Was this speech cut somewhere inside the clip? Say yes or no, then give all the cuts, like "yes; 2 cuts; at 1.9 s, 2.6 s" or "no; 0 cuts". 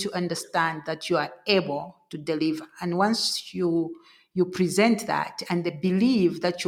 no; 0 cuts